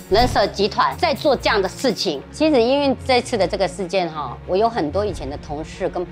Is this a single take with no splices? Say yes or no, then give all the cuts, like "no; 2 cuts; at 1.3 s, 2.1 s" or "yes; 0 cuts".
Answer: no; 1 cut; at 2.2 s